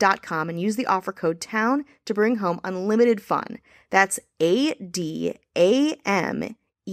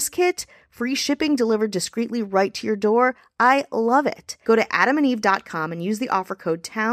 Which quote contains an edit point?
second; 1 cut; at 4.3 s

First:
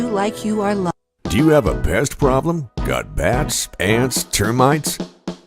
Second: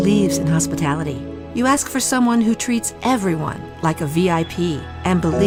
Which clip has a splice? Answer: first; 1 cut; at 0.9 s

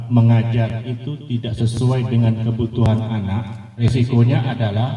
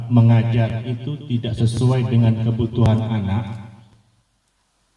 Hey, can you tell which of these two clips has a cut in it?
first; 1 cut; at 3.8 s

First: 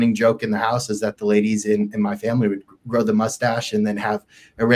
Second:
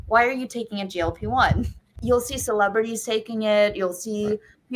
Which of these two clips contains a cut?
second; 1 cut; at 1.9 s

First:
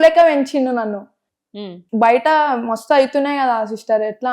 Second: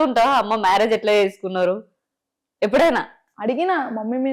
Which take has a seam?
first; 1 cut; at 1.5 s

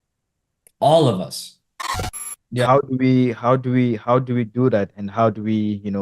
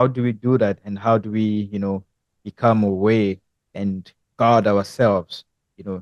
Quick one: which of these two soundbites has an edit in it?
first; 1 cut; at 2.1 s

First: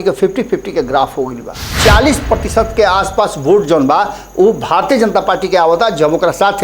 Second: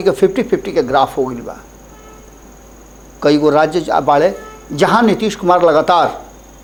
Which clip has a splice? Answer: first; 1 cut; at 1.7 s

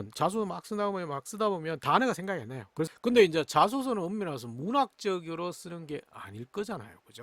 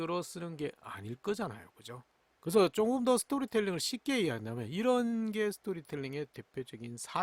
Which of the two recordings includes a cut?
first; 1 cut; at 2.9 s

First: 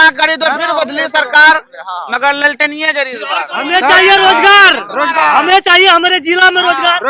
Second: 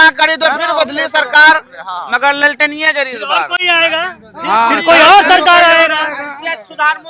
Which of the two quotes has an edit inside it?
first; 1 cut; at 3.5 s

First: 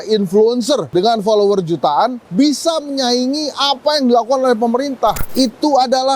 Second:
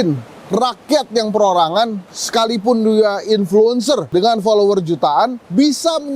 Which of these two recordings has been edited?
first; 1 cut; at 5.2 s

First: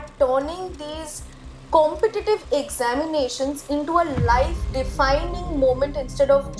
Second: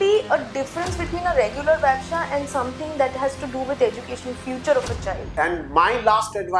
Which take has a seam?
second; 1 cut; at 5.2 s

